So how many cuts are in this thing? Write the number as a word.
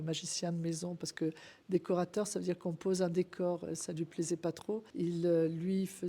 one